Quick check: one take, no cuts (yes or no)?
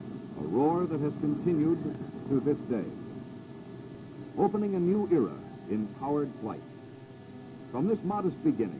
yes